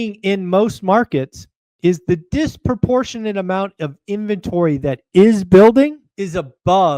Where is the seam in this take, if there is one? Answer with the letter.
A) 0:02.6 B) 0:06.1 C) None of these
B